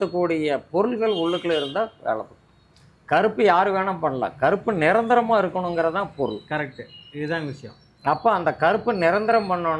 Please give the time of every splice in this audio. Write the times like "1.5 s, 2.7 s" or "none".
none